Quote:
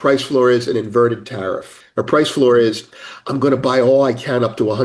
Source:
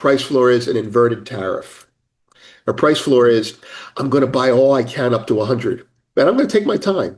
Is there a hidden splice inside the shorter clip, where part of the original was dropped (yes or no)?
yes